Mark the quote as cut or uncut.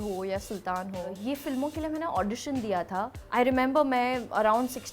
cut